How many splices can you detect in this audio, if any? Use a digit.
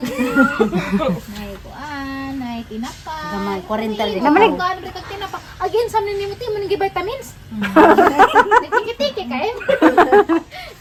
0